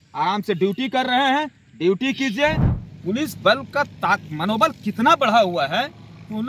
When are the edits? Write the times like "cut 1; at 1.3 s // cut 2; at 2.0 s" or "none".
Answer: cut 1; at 2.7 s